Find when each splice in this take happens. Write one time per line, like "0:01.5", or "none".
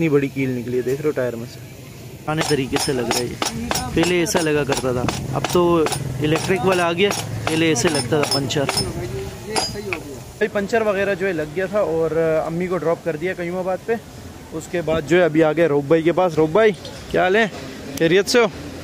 none